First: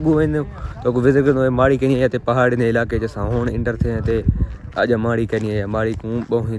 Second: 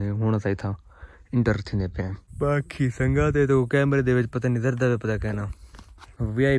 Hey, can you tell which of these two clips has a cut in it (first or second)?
second